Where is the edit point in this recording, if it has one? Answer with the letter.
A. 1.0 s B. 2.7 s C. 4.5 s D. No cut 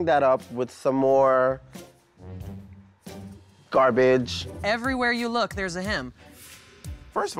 C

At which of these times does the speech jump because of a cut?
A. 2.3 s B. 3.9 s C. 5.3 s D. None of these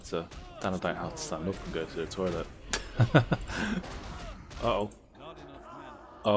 B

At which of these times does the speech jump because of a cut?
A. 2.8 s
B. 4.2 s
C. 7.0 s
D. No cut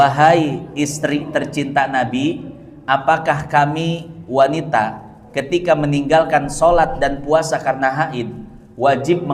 D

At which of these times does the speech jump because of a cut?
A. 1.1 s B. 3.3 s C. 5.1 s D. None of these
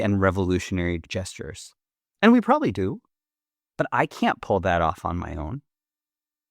A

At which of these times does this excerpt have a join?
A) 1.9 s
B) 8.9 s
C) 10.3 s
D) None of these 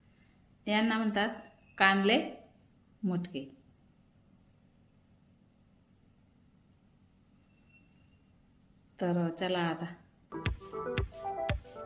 C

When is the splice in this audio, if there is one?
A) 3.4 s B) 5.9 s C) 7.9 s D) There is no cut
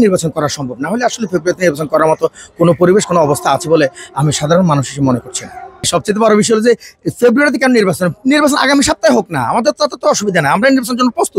B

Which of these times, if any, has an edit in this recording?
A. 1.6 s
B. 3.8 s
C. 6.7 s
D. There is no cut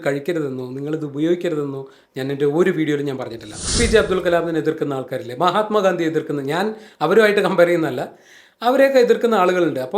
B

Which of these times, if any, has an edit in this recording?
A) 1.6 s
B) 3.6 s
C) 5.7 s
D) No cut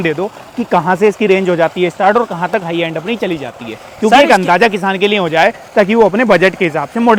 D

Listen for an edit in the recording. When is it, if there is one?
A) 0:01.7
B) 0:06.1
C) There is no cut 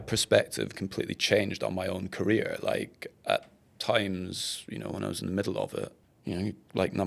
B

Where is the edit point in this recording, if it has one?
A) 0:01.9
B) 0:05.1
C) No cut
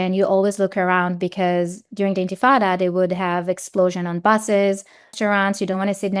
B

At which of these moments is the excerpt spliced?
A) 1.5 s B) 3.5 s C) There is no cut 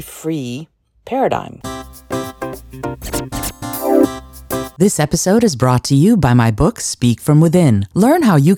A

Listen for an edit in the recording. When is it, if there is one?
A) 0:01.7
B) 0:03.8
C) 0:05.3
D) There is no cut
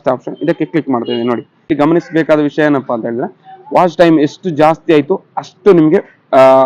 A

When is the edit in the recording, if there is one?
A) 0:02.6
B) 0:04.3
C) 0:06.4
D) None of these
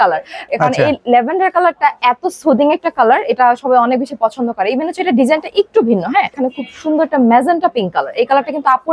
C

